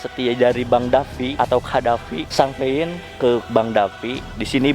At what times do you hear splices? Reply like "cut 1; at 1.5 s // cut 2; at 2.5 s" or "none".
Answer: cut 1; at 1.3 s // cut 2; at 2.2 s